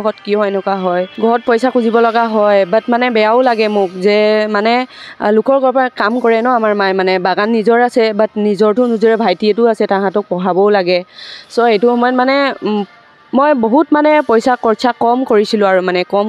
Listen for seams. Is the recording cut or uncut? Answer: cut